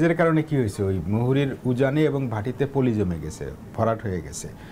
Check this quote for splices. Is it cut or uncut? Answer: uncut